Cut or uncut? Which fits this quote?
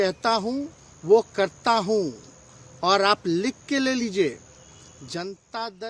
uncut